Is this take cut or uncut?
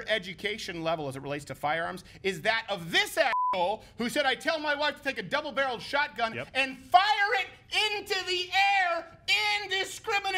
uncut